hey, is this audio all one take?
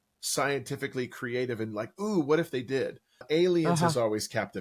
no; 1 cut; at 3.2 s

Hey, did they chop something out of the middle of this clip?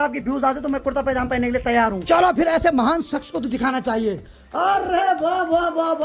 no; 0 cuts

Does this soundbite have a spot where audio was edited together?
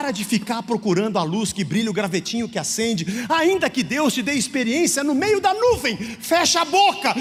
no; 0 cuts

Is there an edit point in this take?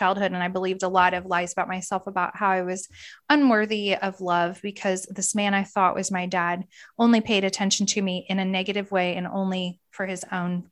no; 0 cuts

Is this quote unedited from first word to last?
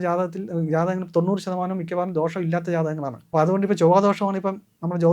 no; 1 cut; at 3.2 s

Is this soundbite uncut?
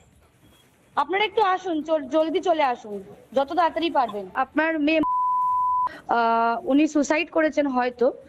no; 1 cut; at 4.3 s

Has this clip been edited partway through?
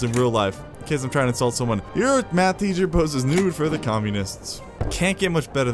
yes; 2 cuts; at 1.9 s, 4.8 s

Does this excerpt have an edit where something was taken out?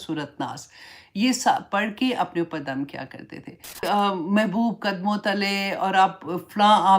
yes; 1 cut; at 3.8 s

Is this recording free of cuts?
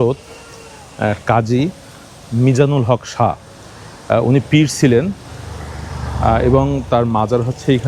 yes; 0 cuts

